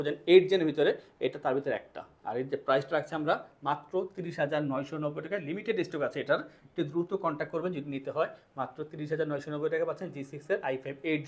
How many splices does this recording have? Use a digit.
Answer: 0